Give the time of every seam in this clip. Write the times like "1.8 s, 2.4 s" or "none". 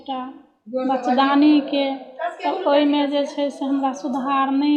none